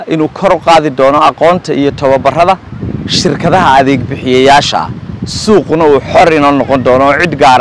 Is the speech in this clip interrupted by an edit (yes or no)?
no